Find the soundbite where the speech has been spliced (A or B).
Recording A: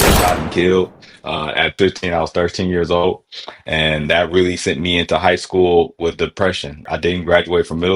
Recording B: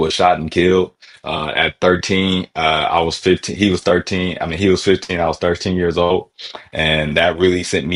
A